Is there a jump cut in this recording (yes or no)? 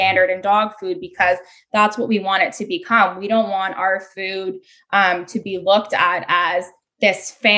no